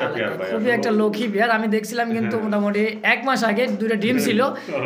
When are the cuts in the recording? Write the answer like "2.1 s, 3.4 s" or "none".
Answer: none